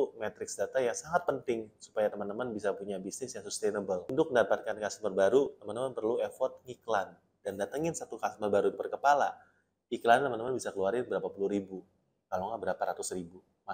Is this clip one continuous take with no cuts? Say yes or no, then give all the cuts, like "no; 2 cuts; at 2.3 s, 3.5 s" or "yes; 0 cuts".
no; 1 cut; at 4.3 s